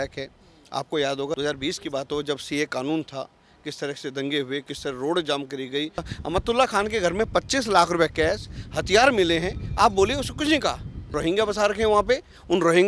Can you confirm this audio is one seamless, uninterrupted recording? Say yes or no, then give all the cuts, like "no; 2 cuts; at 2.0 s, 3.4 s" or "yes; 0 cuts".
no; 2 cuts; at 6.1 s, 11.0 s